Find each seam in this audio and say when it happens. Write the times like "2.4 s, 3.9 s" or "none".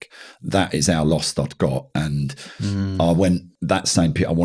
3.5 s